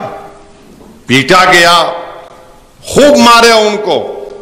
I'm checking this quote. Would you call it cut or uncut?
uncut